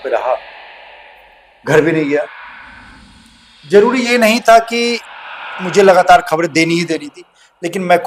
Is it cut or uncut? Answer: uncut